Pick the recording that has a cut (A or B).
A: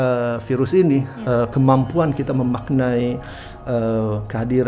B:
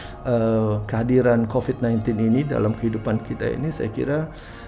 A